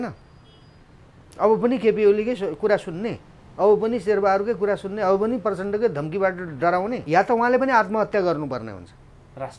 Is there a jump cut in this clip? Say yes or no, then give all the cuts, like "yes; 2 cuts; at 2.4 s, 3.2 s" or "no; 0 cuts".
yes; 1 cut; at 7.0 s